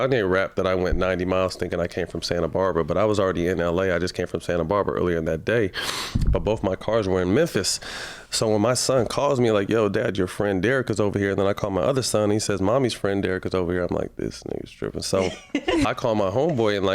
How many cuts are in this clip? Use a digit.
1